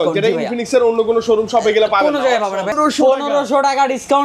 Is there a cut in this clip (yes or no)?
yes